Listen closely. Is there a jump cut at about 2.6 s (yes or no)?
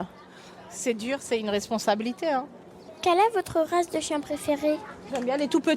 yes